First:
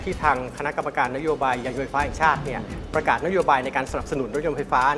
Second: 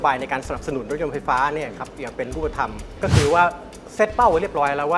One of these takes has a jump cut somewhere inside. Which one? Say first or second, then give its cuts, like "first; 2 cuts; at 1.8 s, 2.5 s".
second; 1 cut; at 3.0 s